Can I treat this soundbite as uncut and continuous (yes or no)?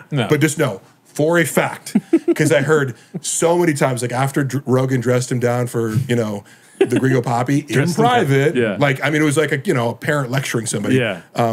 yes